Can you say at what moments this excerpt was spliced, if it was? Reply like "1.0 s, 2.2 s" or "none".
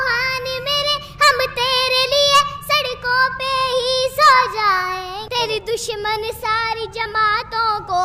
5.2 s